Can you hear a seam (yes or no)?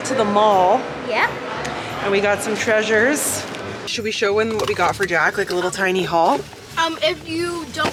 no